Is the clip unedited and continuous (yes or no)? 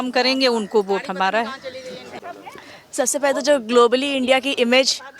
no